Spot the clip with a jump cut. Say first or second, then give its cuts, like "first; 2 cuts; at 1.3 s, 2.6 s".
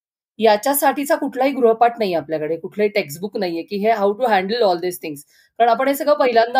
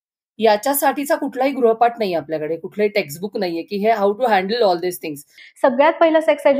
second; 1 cut; at 5.4 s